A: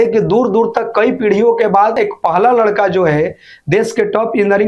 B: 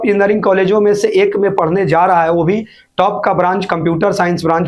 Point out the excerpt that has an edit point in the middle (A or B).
A